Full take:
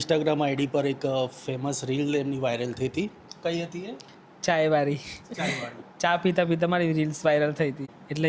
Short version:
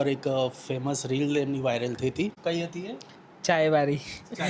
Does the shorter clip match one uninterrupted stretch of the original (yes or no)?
no